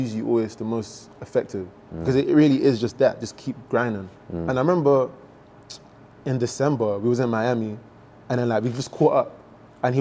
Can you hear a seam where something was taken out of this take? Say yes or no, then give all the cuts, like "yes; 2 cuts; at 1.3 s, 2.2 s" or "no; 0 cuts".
no; 0 cuts